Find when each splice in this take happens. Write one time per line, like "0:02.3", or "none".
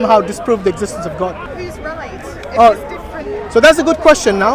0:01.5